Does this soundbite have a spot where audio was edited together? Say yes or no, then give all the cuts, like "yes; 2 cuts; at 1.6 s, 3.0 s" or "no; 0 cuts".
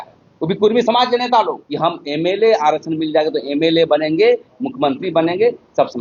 no; 0 cuts